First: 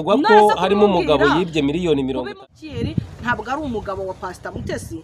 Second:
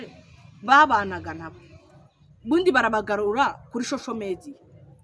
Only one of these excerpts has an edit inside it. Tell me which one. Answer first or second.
first